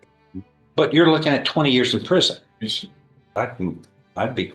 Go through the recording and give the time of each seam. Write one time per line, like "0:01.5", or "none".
0:03.4